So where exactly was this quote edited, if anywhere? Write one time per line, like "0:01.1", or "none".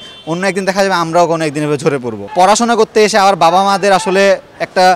0:02.2